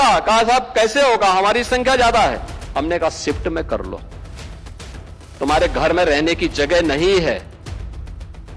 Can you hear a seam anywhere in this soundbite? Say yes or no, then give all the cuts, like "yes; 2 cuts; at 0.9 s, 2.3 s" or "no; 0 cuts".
no; 0 cuts